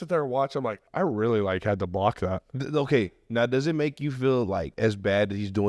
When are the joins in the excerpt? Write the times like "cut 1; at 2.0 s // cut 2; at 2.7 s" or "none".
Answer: cut 1; at 0.8 s // cut 2; at 2.5 s // cut 3; at 4.7 s